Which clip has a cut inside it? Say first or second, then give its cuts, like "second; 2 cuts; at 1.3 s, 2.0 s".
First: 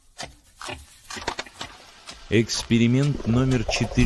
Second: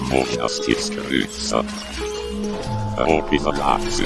first; 1 cut; at 0.9 s